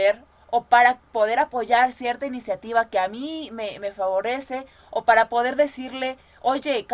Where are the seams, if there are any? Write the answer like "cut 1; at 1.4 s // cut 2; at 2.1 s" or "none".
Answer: none